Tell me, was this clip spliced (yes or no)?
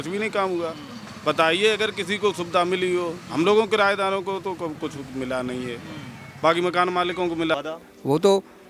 yes